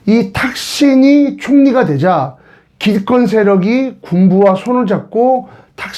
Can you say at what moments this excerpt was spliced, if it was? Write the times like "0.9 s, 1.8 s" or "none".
none